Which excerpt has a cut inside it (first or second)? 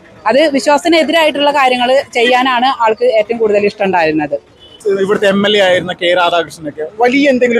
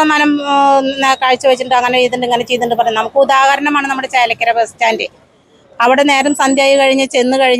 first